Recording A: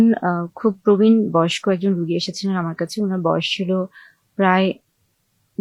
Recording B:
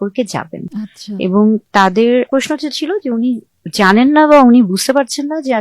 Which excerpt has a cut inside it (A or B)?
B